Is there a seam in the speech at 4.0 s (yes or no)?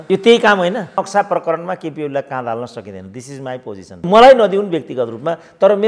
yes